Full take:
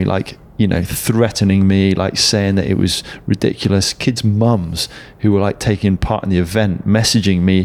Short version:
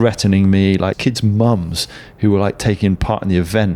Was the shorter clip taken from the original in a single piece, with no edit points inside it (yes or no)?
no